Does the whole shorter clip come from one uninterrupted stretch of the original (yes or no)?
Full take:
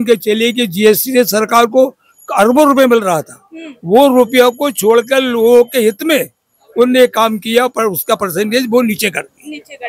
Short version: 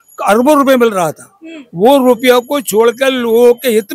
yes